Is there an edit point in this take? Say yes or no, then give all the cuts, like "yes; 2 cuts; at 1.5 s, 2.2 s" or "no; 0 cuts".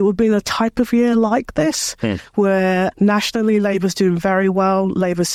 no; 0 cuts